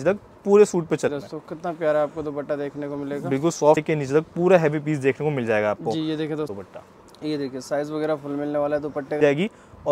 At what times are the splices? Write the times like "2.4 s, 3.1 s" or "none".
1.1 s, 3.8 s, 6.5 s, 9.2 s